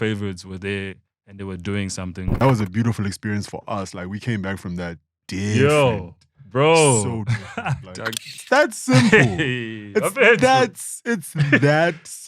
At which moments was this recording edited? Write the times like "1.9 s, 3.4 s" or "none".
2.4 s, 8.2 s

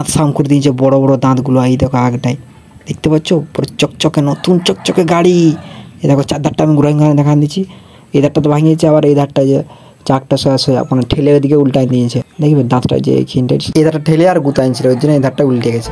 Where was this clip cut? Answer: none

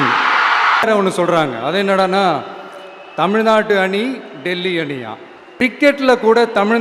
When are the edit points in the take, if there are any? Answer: 0.8 s, 5.7 s

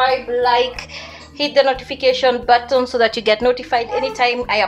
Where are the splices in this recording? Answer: none

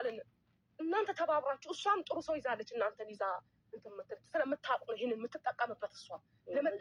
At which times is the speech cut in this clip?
none

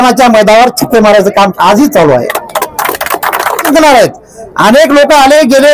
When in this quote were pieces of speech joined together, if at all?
3.7 s

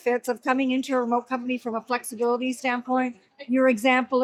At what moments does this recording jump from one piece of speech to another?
none

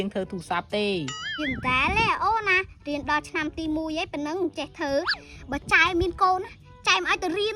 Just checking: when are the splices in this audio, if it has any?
1.2 s

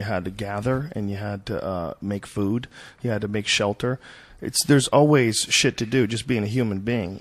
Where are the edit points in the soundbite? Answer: none

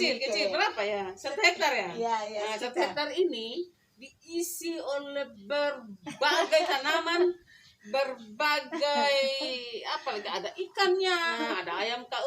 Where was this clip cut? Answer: 11.3 s

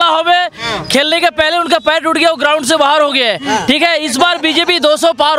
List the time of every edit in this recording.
none

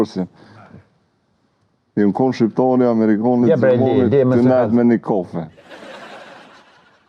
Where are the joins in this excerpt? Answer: none

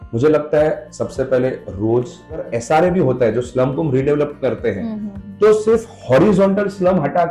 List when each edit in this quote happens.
2.5 s

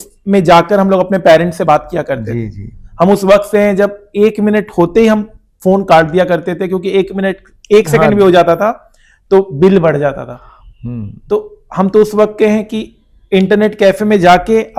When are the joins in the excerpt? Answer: none

